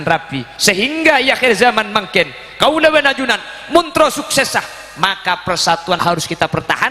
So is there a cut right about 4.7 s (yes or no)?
no